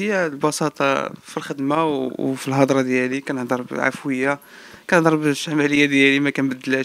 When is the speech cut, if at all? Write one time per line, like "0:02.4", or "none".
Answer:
none